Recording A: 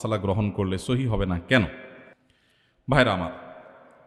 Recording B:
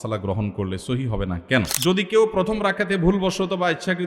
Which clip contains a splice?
B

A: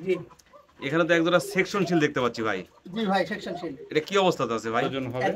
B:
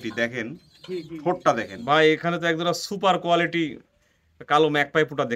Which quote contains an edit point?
B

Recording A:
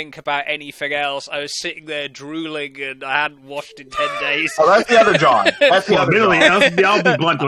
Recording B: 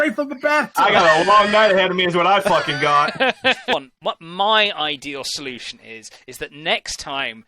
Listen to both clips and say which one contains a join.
B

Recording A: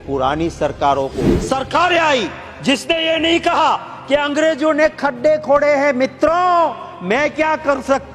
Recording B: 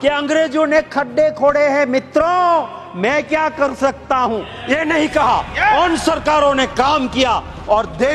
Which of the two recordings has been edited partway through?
A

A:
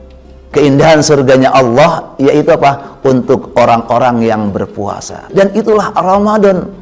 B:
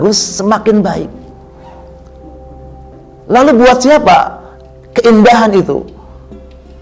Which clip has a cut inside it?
B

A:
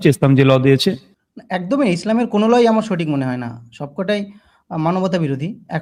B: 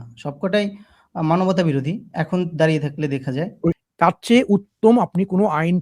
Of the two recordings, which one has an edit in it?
B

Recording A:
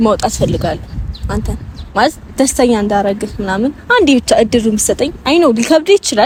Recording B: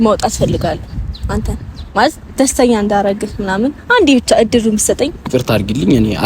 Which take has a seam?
B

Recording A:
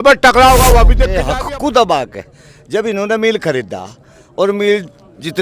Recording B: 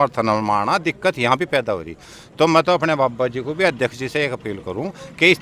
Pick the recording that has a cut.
A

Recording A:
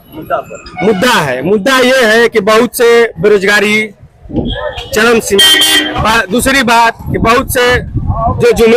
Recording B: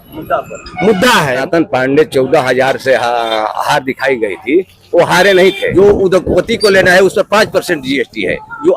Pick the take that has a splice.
B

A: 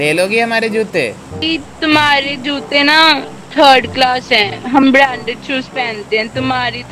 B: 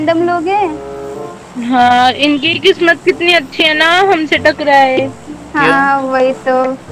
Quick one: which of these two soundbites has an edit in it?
A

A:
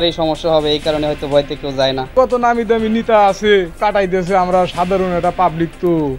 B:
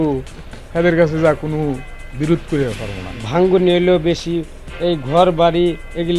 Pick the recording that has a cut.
A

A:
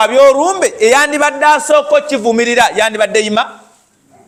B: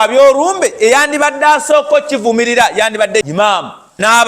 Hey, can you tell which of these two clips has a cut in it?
B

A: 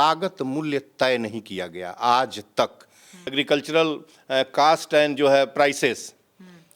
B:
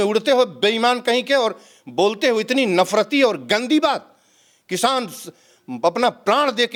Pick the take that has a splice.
A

